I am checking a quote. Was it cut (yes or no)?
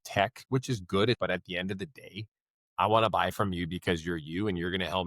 yes